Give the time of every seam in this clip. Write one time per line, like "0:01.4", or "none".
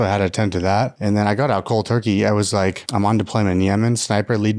0:02.8